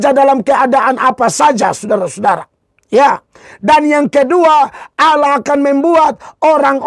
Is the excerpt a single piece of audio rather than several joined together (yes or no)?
yes